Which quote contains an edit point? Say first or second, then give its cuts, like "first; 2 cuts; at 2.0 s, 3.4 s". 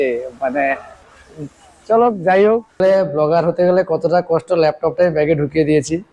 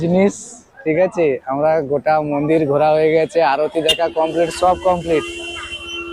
first; 1 cut; at 2.8 s